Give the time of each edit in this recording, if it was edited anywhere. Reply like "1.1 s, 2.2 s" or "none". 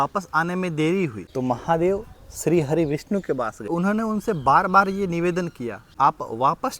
1.2 s, 3.7 s, 5.8 s